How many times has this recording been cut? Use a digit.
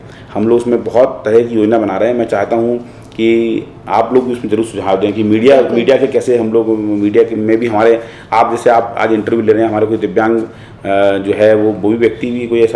0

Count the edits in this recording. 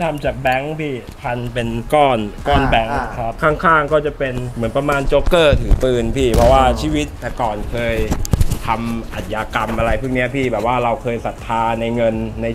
0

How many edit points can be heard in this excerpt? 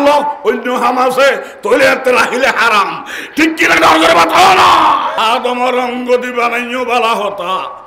1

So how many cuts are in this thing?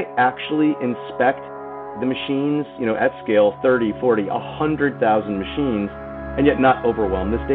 2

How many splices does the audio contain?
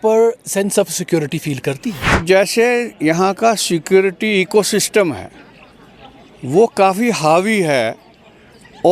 1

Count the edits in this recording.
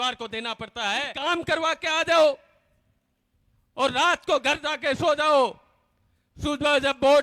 1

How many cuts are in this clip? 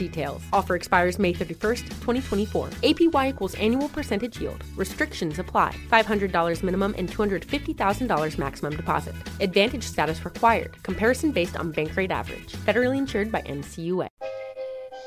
1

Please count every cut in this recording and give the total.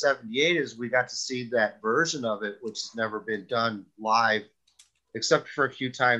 0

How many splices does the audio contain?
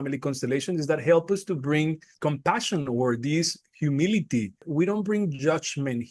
1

